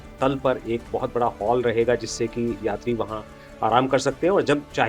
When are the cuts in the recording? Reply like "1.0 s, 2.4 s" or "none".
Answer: none